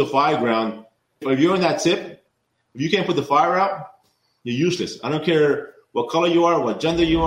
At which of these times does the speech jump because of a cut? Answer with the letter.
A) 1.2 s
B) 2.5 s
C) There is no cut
A